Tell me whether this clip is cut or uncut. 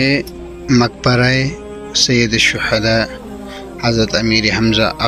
uncut